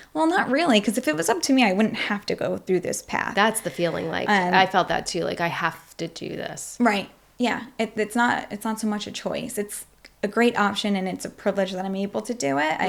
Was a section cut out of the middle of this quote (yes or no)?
no